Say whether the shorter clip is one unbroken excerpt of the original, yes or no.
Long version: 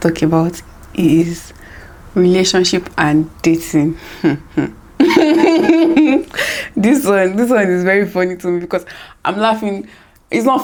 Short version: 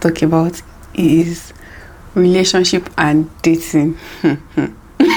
yes